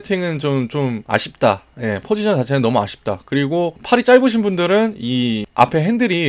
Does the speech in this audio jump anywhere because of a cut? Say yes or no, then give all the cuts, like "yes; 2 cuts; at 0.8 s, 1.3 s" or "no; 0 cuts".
yes; 3 cuts; at 1.0 s, 3.8 s, 5.4 s